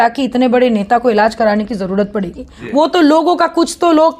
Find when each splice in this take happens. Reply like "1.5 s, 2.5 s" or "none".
2.5 s